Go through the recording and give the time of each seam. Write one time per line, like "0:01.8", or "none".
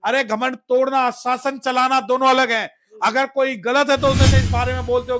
0:04.3